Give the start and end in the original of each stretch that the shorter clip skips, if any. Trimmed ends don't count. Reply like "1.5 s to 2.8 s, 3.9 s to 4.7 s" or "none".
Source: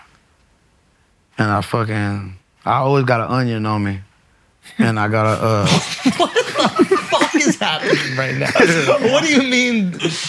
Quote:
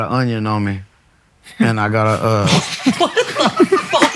none

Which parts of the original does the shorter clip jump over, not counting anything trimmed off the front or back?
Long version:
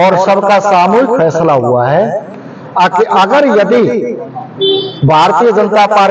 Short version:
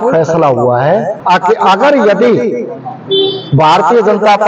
2.2 s to 2.6 s

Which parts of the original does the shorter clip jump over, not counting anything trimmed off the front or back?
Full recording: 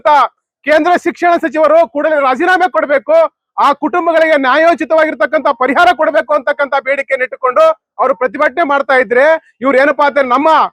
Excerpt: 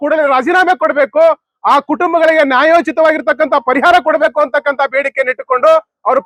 none

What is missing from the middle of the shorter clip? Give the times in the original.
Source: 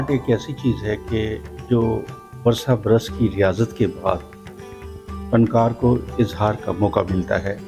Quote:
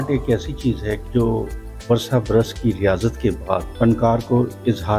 1.0 s to 1.6 s, 4.2 s to 5.2 s

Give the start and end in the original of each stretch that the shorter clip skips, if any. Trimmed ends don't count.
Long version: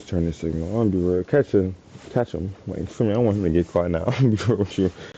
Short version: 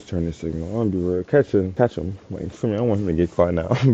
1.7 s to 2.1 s

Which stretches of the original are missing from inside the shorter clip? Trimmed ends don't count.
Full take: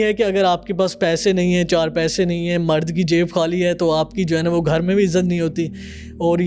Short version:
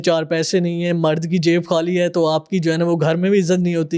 none

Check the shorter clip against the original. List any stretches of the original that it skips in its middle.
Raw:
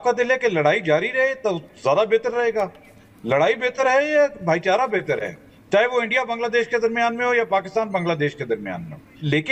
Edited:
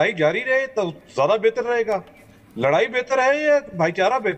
none

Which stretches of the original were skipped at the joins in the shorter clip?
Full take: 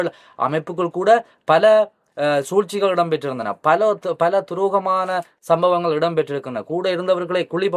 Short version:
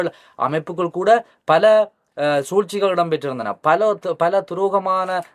none

